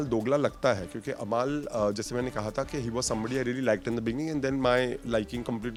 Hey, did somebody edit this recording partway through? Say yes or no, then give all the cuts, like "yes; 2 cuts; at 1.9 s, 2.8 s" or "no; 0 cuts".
no; 0 cuts